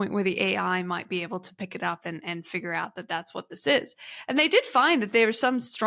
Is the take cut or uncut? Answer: uncut